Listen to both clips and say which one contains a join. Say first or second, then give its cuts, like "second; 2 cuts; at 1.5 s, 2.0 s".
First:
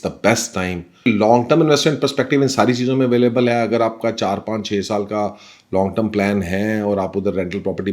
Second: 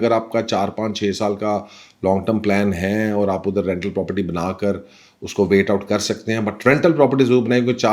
first; 1 cut; at 1.1 s